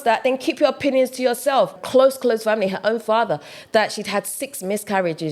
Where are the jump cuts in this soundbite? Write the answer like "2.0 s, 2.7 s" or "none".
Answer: 1.8 s